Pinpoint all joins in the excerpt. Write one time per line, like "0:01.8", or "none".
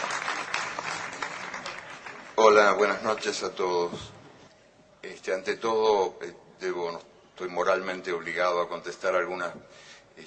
0:06.8